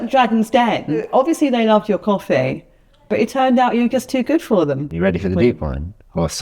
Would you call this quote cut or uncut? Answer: cut